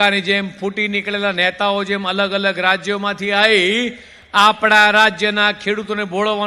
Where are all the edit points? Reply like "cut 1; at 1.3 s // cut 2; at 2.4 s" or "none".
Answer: none